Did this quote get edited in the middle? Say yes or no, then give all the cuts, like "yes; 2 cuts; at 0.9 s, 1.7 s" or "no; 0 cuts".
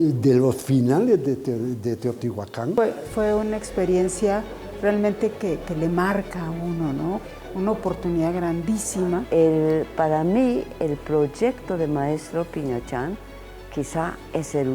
yes; 3 cuts; at 3.1 s, 7.3 s, 9.2 s